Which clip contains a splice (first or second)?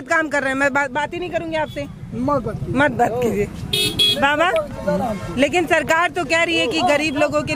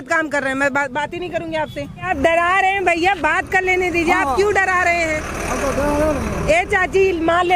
second